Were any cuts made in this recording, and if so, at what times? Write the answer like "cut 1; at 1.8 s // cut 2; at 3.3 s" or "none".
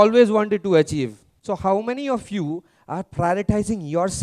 cut 1; at 1.3 s